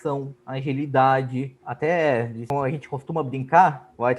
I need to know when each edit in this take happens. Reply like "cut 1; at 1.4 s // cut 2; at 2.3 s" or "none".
cut 1; at 1.6 s // cut 2; at 2.4 s